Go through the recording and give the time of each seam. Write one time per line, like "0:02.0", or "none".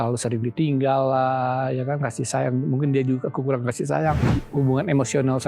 0:04.3